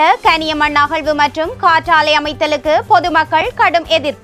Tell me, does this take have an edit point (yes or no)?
no